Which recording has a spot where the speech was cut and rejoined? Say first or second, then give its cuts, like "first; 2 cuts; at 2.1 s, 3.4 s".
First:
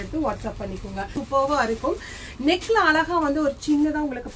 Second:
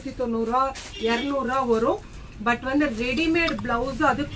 first; 1 cut; at 1.2 s